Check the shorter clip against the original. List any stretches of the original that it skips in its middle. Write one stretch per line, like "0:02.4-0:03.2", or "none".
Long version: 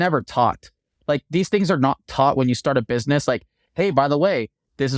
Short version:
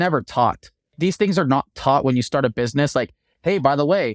0:00.9-0:01.2